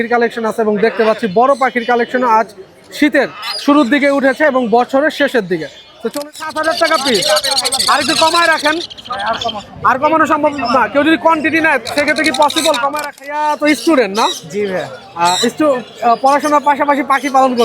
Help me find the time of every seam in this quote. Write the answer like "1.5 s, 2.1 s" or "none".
6.1 s, 13.2 s